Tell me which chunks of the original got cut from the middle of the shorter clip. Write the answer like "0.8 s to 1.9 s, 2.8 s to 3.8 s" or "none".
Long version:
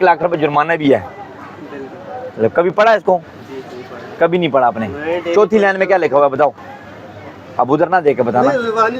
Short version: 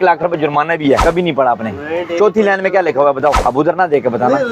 1.0 s to 4.2 s, 6.5 s to 7.5 s